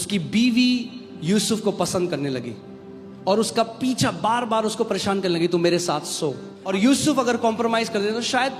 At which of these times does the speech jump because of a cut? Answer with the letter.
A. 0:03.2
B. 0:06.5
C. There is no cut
B